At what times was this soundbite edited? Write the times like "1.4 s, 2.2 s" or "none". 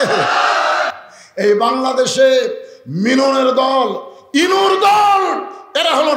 0.9 s